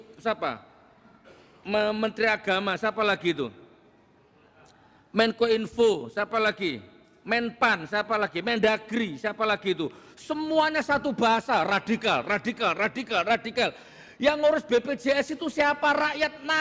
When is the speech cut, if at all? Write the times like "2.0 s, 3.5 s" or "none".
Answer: none